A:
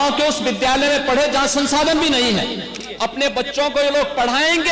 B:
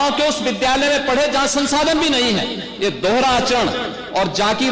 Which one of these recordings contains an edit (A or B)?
A